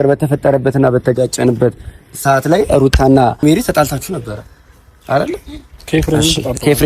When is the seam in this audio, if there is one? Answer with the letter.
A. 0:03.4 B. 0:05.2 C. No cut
A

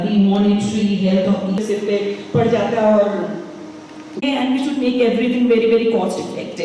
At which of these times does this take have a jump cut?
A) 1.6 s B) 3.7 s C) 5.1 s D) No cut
A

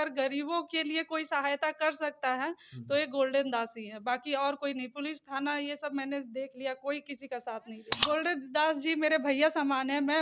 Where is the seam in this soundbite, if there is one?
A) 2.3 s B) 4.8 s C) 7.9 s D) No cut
C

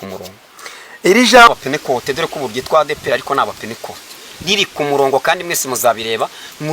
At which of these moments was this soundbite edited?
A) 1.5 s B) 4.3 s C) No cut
A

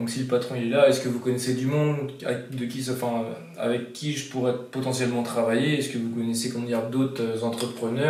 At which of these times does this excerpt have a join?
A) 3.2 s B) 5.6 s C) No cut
C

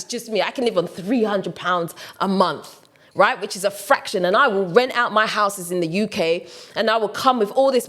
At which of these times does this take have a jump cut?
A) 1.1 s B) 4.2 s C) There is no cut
C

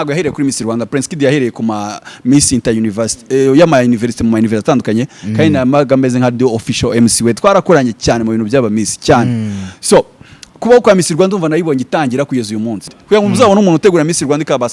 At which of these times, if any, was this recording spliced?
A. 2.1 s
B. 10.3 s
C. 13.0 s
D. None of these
C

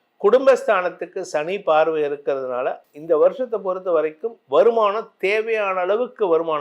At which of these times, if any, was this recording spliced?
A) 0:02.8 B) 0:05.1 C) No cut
A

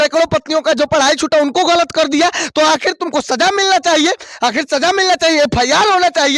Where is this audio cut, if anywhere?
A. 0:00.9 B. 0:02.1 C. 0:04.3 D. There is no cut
D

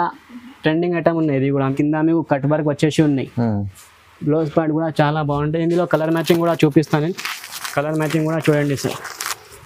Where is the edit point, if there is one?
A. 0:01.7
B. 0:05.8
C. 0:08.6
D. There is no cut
A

